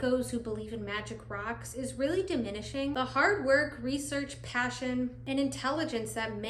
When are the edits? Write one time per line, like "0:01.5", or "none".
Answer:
none